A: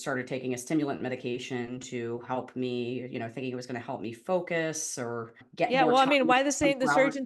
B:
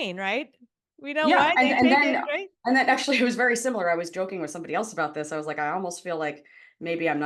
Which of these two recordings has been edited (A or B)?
A